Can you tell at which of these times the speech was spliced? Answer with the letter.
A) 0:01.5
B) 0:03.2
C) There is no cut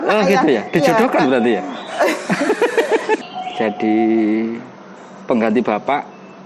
B